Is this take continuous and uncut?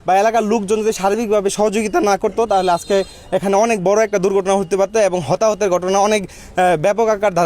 yes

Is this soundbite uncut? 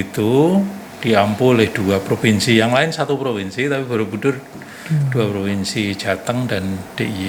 yes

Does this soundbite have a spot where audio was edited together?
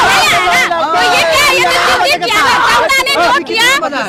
no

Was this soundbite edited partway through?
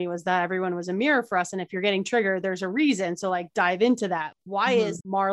no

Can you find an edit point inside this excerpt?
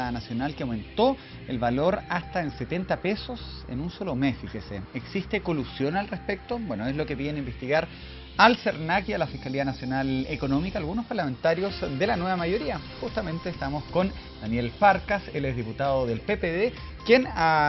yes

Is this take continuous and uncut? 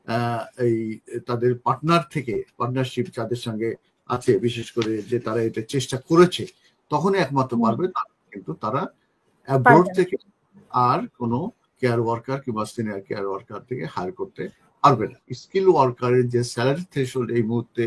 no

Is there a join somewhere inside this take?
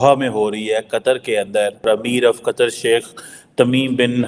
yes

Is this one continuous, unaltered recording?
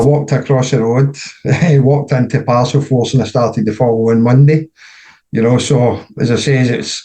yes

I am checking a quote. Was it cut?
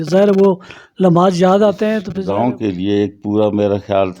yes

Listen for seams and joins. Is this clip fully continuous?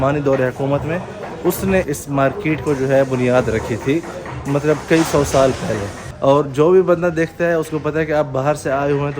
no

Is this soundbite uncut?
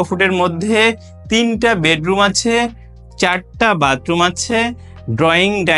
yes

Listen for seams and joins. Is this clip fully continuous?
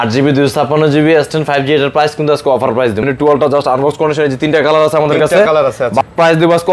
no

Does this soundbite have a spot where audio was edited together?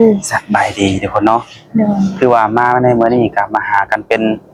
no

